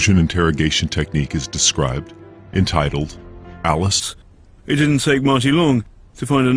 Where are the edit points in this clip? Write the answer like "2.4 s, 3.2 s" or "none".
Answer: none

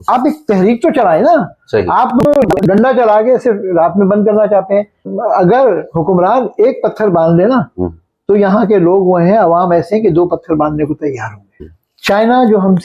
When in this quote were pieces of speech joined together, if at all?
5.0 s, 11.7 s

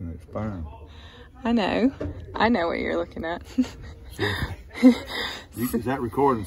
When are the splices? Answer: none

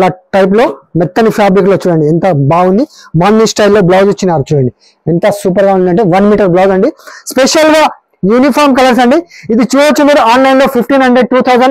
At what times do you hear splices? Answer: none

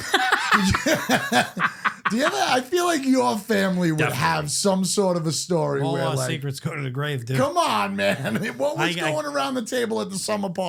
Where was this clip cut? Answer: none

